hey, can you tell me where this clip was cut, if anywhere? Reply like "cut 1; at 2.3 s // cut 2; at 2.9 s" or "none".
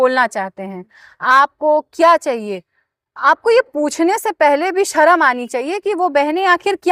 none